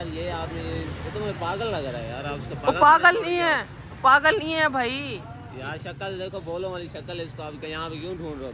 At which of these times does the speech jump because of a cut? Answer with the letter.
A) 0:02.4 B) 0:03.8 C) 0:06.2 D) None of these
D